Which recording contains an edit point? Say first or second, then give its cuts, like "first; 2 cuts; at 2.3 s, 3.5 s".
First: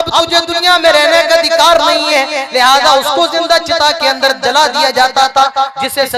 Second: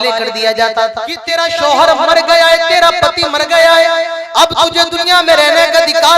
second; 1 cut; at 1.2 s